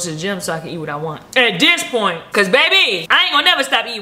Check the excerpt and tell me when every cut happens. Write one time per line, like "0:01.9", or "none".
0:01.2
0:02.2
0:03.0